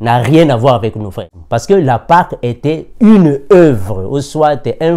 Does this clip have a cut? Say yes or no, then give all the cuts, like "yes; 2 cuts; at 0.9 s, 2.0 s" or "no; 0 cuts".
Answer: yes; 1 cut; at 1.3 s